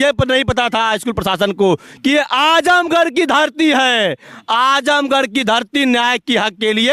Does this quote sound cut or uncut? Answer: uncut